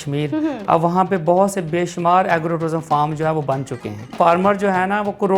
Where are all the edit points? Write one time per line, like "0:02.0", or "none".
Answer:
0:04.1